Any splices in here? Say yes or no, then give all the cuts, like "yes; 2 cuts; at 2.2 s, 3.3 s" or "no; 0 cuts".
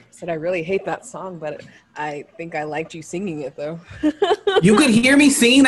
yes; 1 cut; at 4.6 s